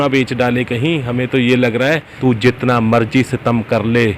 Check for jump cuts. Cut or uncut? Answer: cut